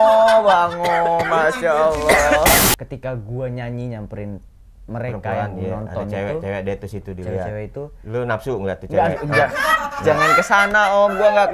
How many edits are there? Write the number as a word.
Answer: one